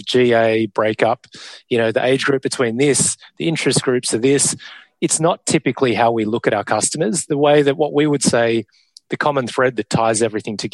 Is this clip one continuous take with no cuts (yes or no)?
yes